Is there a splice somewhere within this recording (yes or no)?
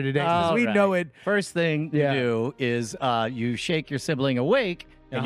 yes